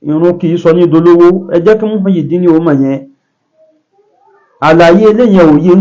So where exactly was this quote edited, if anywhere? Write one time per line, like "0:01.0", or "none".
none